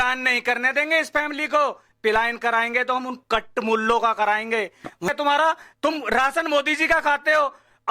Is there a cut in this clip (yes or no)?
yes